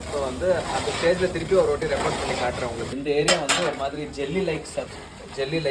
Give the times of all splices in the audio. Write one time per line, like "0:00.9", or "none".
0:02.9

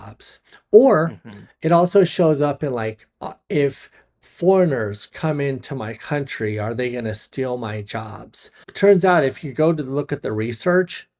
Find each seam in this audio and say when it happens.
0:08.7

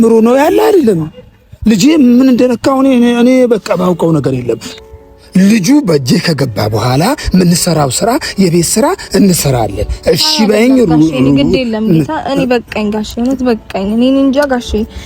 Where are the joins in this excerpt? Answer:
0:04.7

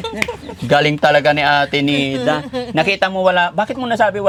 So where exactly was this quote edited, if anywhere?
none

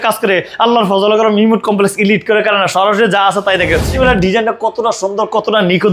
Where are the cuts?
0:04.0

